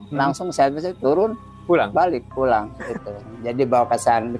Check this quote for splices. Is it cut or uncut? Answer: cut